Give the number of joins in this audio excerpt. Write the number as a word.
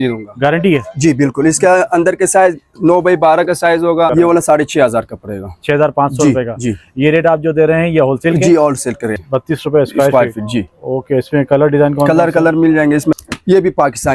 three